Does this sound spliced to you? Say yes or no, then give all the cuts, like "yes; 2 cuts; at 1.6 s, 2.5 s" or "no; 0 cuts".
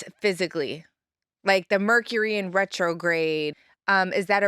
yes; 1 cut; at 3.6 s